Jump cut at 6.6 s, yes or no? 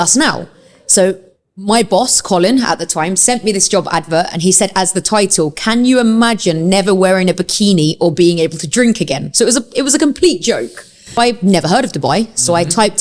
no